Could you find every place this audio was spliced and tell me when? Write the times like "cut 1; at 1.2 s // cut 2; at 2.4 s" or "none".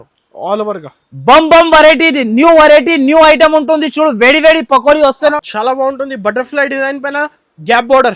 cut 1; at 5.4 s

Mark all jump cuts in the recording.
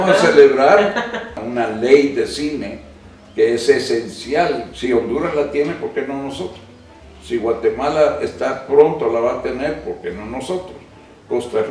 cut 1; at 1.4 s

